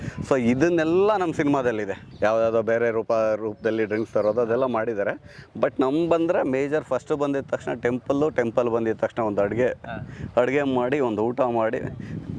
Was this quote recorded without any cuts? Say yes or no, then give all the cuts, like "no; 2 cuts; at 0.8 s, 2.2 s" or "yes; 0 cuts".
no; 1 cut; at 2.0 s